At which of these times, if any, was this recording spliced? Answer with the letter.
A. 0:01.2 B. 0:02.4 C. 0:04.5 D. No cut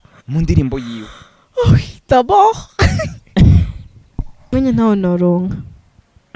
C